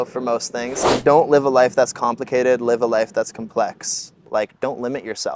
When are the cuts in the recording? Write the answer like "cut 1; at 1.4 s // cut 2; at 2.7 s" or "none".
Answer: cut 1; at 0.9 s // cut 2; at 4.2 s